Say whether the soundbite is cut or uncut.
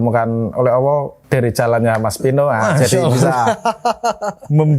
cut